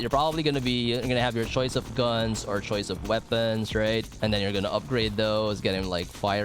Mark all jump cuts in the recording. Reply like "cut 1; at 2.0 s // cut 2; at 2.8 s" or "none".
cut 1; at 4.1 s